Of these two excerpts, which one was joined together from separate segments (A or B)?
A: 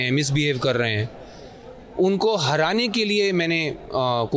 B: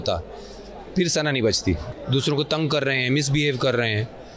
B